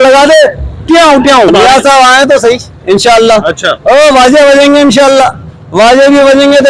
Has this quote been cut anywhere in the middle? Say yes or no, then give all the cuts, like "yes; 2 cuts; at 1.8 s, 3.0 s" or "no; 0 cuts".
yes; 1 cut; at 1.5 s